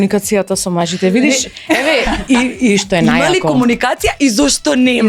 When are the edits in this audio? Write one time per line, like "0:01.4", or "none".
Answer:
none